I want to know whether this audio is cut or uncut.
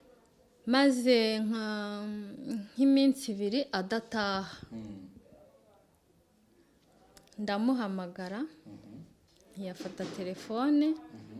uncut